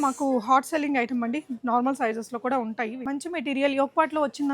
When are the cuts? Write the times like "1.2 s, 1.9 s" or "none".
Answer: 3.1 s